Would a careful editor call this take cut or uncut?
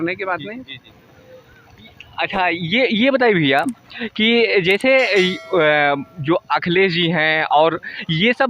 uncut